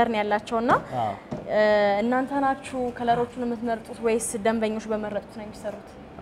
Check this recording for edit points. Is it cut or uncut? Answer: uncut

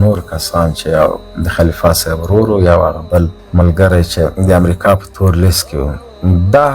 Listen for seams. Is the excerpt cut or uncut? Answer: cut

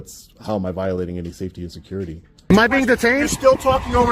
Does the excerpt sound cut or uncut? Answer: cut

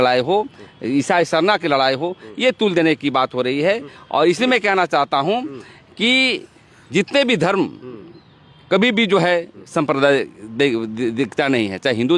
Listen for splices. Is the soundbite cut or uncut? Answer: uncut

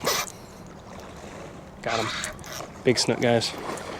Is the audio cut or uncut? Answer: uncut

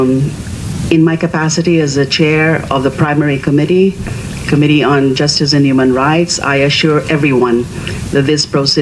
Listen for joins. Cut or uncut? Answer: cut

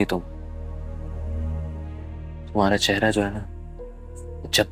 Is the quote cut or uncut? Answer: uncut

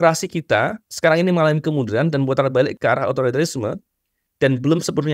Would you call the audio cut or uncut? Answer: uncut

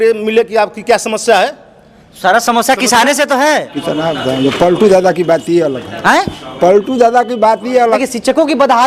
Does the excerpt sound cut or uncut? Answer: cut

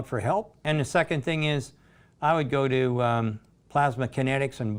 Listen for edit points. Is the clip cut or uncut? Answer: uncut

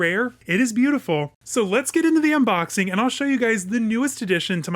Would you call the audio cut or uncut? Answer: cut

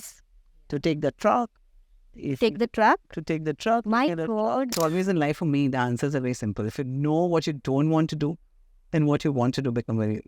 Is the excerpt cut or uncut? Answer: cut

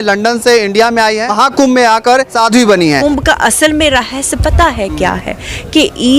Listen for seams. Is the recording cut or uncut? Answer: cut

